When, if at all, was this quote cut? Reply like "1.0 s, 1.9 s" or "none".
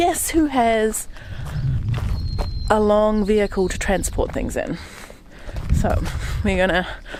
none